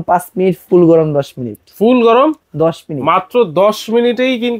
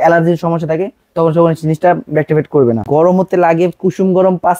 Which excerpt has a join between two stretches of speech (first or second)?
second